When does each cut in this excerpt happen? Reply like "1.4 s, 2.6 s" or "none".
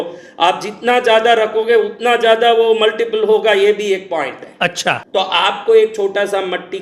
5.0 s

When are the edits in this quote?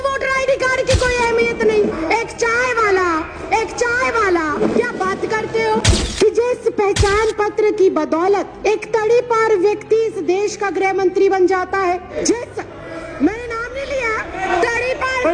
1.9 s, 4.6 s, 6.0 s, 8.5 s, 12.1 s, 14.4 s

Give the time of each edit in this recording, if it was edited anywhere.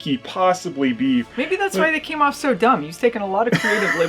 1.3 s

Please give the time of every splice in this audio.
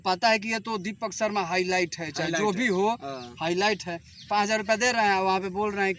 none

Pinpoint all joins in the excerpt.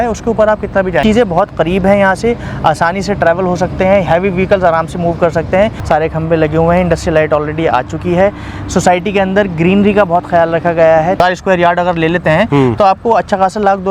1.0 s, 5.8 s, 11.2 s

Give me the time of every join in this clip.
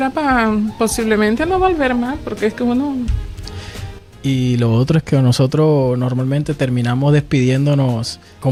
none

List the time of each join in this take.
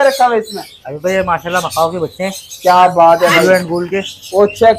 none

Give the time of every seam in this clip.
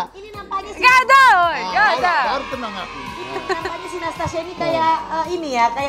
none

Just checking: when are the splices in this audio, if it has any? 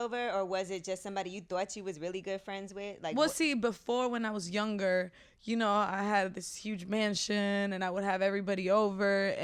none

